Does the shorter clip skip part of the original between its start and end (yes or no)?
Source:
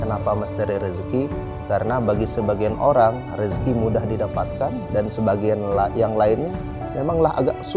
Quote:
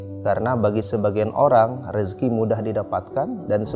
no